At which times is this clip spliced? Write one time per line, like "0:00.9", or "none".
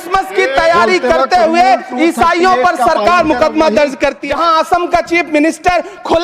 0:04.2

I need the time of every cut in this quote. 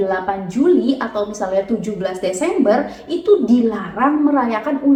none

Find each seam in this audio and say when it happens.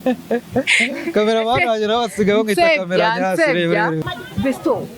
0:04.0

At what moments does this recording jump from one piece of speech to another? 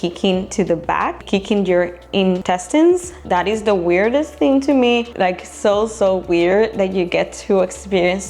0:01.2
0:02.4
0:03.2
0:05.1

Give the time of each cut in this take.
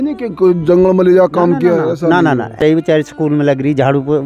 0:02.5

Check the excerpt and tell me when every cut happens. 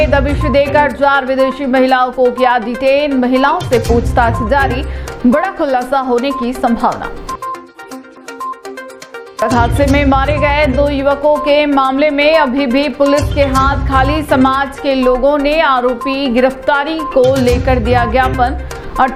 none

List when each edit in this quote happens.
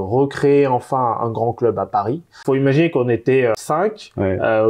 0:02.3
0:03.6

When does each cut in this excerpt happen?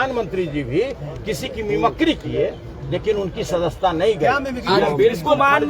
none

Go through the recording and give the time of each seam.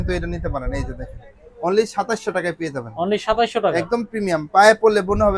none

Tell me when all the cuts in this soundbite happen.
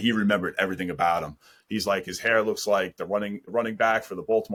none

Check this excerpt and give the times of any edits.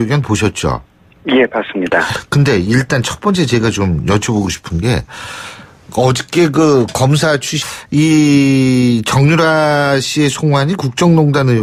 none

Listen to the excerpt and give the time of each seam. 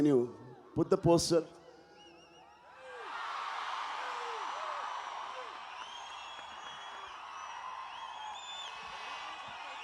none

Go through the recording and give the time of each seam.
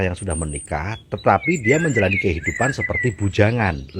none

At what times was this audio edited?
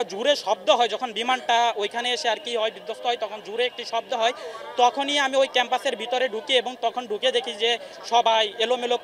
none

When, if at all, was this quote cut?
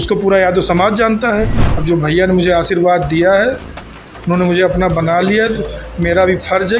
0:01.7

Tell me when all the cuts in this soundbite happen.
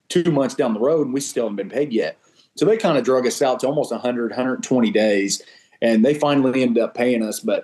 none

